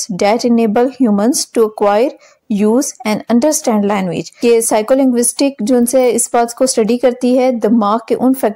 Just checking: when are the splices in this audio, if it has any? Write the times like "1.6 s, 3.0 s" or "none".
4.2 s